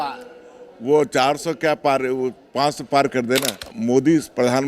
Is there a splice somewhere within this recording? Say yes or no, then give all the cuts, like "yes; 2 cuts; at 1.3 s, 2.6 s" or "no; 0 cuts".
yes; 1 cut; at 3.7 s